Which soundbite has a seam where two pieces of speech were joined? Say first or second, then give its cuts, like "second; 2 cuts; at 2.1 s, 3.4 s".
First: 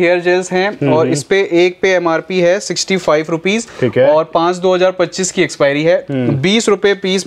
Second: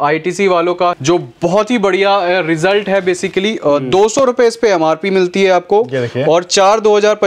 second; 1 cut; at 1.0 s